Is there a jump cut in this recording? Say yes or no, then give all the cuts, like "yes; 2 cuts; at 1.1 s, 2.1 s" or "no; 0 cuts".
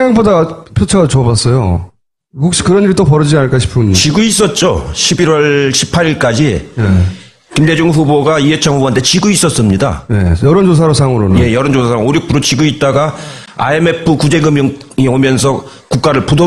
yes; 1 cut; at 13.9 s